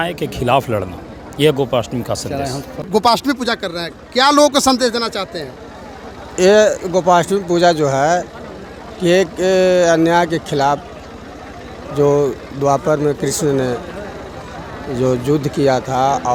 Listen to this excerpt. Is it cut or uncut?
uncut